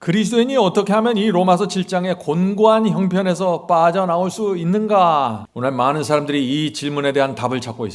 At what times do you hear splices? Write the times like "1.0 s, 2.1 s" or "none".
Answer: 5.4 s